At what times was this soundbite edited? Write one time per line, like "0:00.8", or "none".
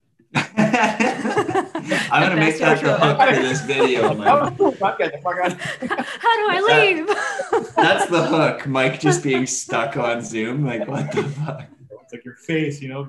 none